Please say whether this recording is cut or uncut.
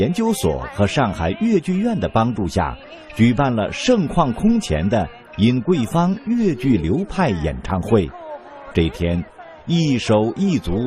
cut